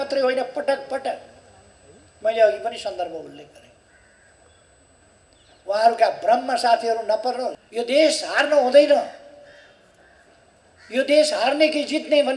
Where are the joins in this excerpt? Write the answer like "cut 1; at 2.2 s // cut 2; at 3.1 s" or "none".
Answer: cut 1; at 7.6 s